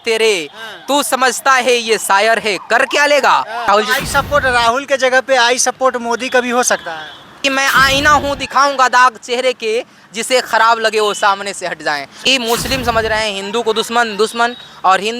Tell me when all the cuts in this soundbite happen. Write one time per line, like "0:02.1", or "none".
0:03.7
0:07.4
0:12.1